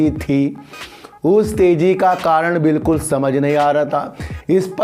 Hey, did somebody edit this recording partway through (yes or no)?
no